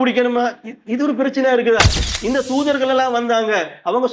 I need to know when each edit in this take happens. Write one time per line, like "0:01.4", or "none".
0:02.1

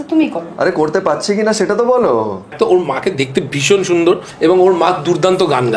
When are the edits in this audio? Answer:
0:02.5
0:04.3

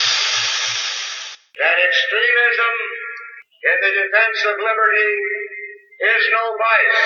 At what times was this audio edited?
none

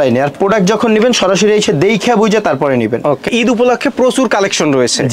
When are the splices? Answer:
0:03.3

